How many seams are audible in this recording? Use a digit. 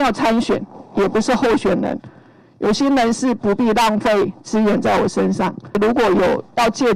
1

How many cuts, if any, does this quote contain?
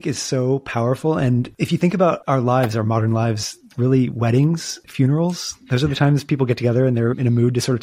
1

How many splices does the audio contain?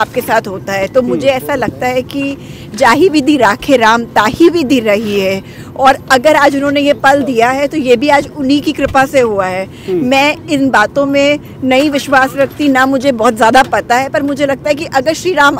0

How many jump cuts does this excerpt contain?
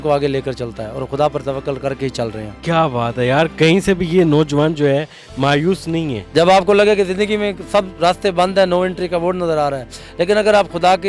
2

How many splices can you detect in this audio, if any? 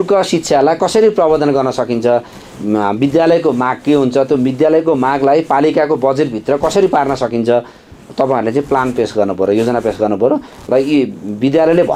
0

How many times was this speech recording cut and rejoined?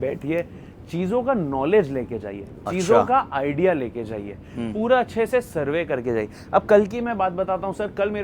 0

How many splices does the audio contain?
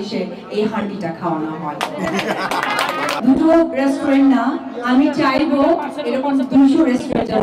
1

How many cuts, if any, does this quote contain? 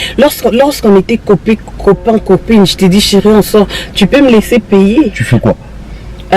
1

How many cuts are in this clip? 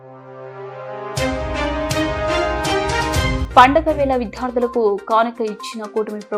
1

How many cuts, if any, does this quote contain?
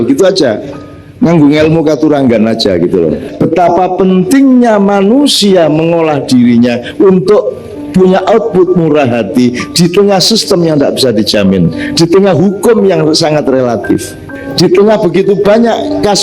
2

